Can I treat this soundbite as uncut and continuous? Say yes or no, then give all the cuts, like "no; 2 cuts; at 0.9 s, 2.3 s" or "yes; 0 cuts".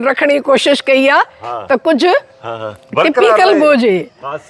yes; 0 cuts